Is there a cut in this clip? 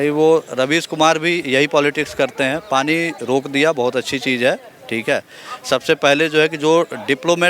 no; 0 cuts

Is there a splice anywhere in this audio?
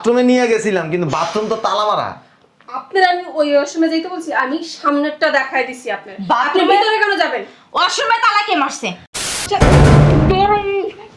yes; 1 cut; at 9.4 s

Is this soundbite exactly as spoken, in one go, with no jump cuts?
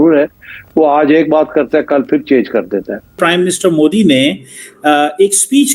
no; 1 cut; at 3.2 s

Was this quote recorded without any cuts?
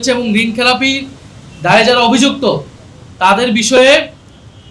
yes; 0 cuts

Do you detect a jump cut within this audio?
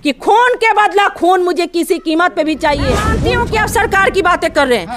yes; 1 cut; at 3.1 s

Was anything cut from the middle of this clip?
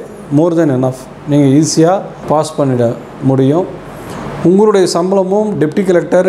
yes; 2 cuts; at 2.2 s, 3.9 s

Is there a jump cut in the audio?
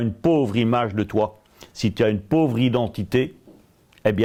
no; 0 cuts

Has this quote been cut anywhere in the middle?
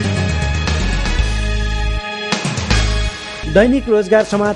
no; 0 cuts

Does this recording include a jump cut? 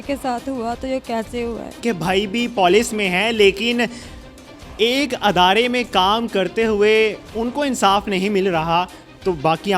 yes; 1 cut; at 1.8 s

